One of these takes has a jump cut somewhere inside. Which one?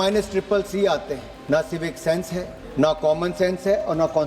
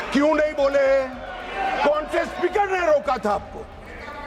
first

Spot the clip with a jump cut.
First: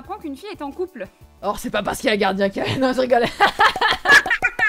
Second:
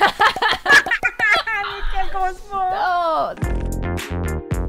second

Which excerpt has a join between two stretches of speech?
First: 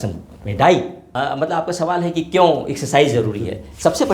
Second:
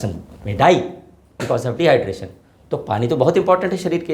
first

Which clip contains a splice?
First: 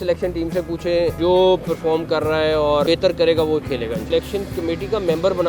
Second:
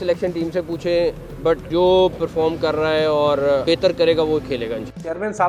first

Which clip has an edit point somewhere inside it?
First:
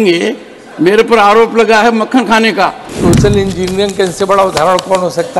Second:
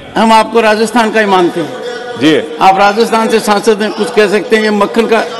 first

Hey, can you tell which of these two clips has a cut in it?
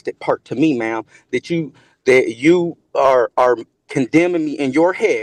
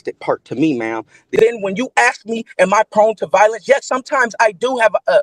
second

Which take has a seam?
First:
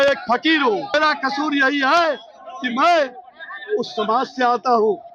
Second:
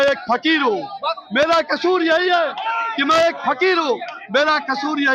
first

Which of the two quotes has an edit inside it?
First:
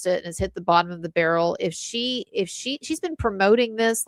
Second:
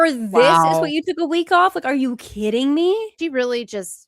second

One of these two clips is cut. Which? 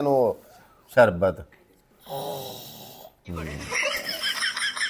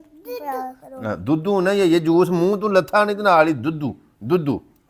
first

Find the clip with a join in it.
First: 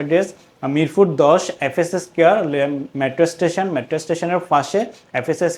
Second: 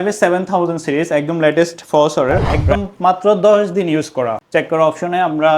second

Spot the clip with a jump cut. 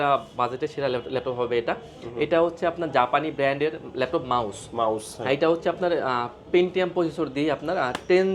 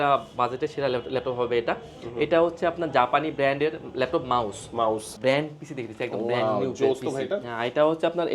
second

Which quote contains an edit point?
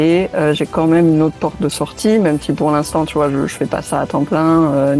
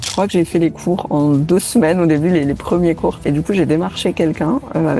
second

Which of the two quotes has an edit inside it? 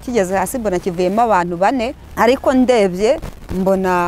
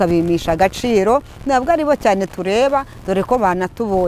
first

